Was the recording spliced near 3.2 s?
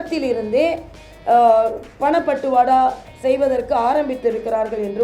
no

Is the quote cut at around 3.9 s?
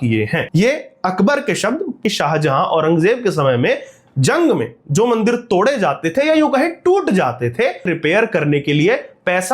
no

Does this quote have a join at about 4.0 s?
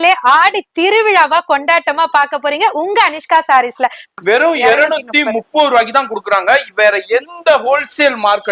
yes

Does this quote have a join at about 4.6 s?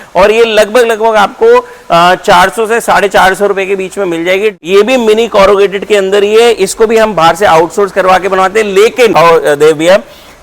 yes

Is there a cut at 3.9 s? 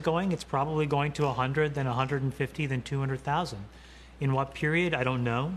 no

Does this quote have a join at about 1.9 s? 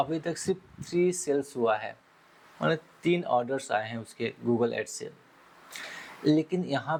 no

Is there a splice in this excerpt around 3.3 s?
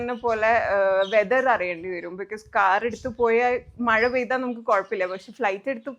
no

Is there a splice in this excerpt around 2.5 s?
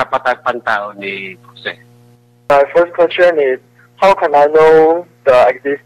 yes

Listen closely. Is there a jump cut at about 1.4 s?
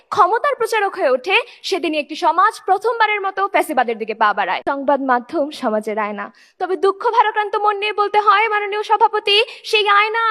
no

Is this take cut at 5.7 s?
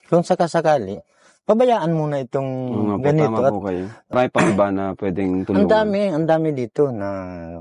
no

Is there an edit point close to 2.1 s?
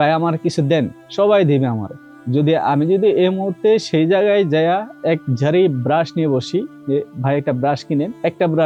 no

